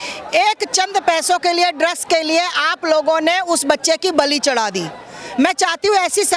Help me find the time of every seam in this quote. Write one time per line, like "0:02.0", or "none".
none